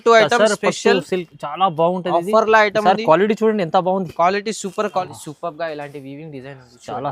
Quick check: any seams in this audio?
yes; 1 cut; at 5.0 s

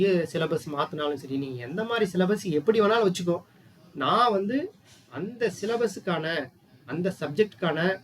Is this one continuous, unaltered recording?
yes; 0 cuts

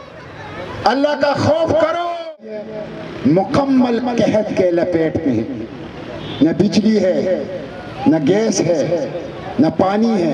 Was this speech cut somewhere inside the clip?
yes; 1 cut; at 2.4 s

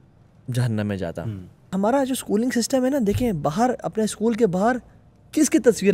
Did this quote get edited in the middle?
yes; 1 cut; at 1.7 s

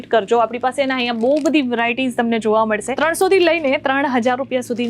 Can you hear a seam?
yes; 1 cut; at 2.9 s

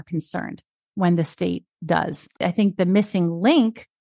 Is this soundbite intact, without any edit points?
no; 1 cut; at 2.4 s

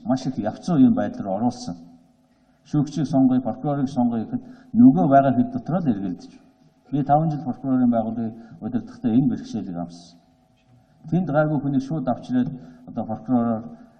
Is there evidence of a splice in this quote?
yes; 1 cut; at 9.7 s

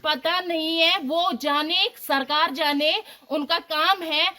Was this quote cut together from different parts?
no; 0 cuts

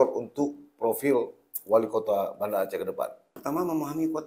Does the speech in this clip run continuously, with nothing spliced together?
no; 1 cut; at 3.3 s

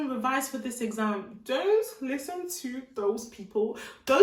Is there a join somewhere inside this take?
no; 0 cuts

